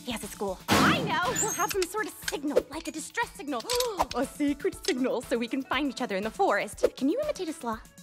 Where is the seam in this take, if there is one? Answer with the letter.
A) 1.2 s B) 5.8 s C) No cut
B